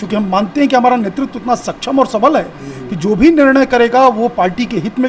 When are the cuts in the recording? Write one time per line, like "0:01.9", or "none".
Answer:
none